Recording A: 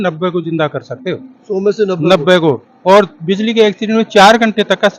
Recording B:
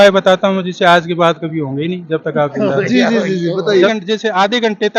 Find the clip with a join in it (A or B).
B